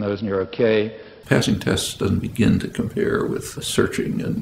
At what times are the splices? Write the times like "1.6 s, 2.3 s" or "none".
1.1 s, 3.5 s